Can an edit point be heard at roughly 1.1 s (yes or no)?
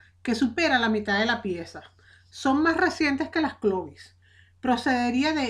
yes